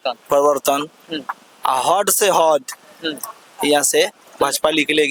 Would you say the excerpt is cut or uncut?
uncut